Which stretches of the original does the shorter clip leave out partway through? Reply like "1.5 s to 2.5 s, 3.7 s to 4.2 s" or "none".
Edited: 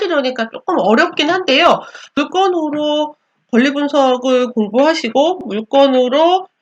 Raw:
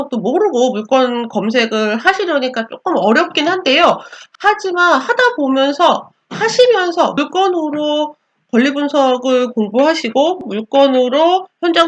4.3 s to 7.1 s